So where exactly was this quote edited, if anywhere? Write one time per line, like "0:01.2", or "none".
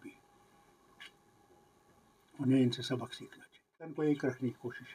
0:04.0